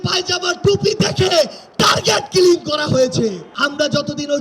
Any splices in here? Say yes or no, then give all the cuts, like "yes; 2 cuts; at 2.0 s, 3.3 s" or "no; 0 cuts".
yes; 1 cut; at 3.5 s